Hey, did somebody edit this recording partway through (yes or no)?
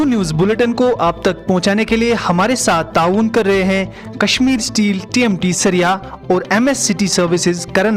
no